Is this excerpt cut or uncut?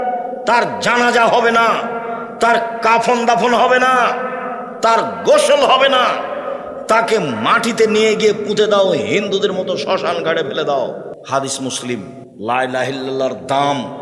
cut